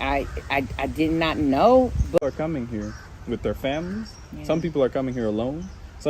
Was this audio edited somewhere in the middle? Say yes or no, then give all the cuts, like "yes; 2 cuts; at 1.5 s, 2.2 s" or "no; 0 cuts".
yes; 1 cut; at 2.2 s